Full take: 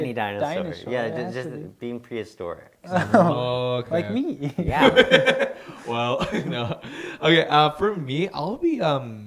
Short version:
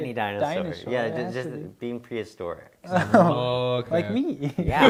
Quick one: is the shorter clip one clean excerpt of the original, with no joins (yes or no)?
yes